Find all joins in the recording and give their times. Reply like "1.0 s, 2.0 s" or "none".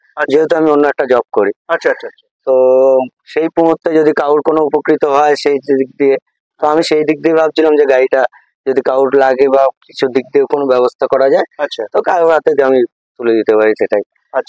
none